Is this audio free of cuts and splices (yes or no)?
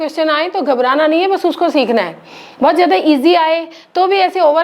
yes